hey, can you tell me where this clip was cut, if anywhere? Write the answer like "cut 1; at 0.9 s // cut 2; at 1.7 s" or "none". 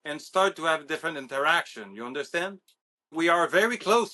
cut 1; at 3.1 s